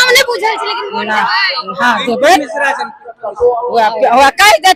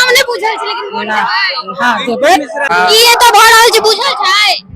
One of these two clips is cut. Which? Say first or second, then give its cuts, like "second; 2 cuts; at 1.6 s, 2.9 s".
second; 1 cut; at 2.7 s